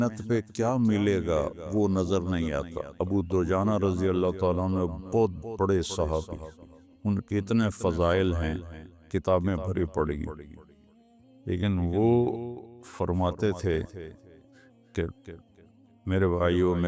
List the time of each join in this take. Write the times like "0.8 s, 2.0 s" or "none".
2.8 s